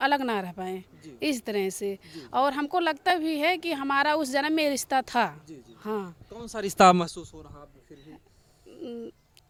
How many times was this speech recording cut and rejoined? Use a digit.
0